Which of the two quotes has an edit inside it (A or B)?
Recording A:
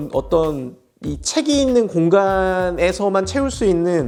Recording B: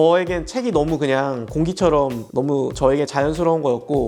B